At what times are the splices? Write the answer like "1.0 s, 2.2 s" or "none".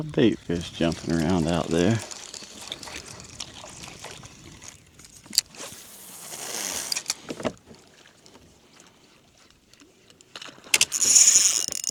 none